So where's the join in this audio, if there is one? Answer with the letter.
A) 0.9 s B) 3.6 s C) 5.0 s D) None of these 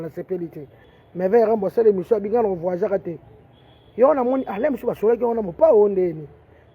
A